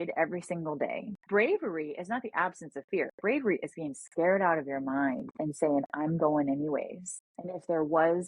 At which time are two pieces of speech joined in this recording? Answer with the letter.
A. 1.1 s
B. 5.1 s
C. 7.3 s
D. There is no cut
A